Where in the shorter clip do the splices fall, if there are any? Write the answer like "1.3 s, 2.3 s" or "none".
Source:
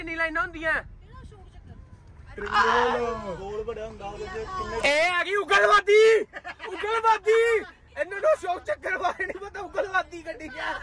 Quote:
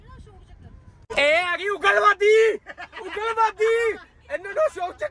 1.1 s